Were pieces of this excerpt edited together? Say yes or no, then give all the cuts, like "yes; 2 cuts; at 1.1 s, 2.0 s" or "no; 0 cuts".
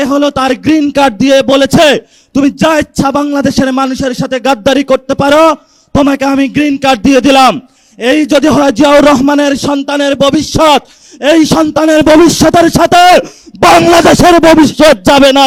no; 0 cuts